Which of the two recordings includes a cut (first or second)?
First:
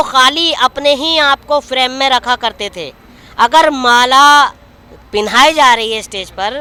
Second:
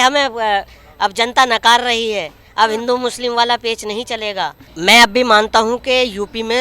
second